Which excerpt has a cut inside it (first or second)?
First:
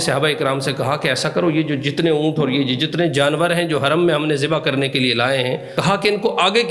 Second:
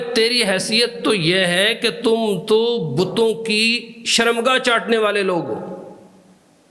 first